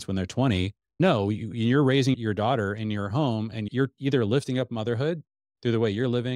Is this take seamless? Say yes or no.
no